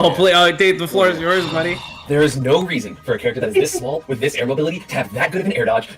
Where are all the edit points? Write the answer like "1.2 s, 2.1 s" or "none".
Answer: 1.9 s